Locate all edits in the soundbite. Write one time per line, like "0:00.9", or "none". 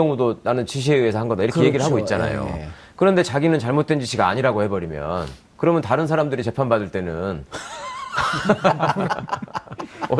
0:06.6

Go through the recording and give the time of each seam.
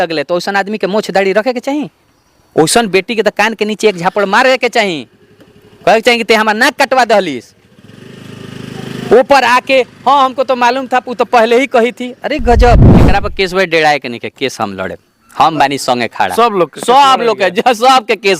0:13.1

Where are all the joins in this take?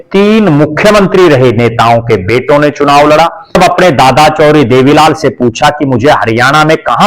0:03.6

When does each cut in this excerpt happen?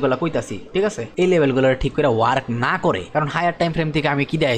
0:01.0
0:03.0

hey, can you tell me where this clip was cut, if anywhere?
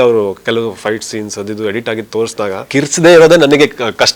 0:02.6

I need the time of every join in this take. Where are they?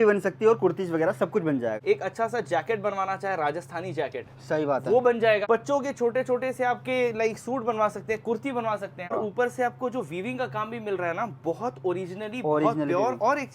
0:01.8
0:05.4
0:09.1

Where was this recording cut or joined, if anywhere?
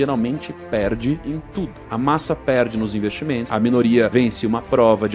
0:01.5
0:03.5
0:04.1

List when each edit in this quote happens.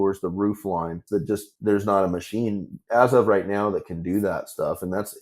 0:01.4
0:02.7

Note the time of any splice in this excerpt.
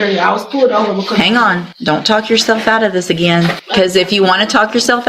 0:01.7
0:03.6

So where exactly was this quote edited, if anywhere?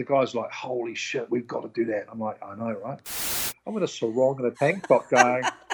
0:03.4
0:04.5

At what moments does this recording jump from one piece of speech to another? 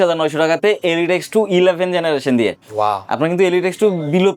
none

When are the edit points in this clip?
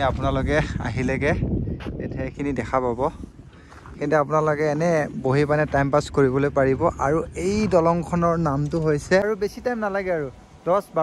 0:09.2

